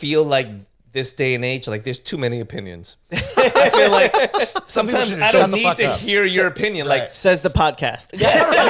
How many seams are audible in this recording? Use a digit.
0